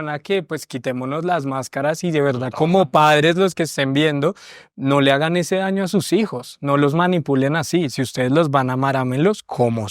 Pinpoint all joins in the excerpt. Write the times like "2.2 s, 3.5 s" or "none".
none